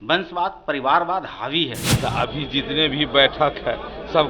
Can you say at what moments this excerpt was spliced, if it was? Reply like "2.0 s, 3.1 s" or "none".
1.8 s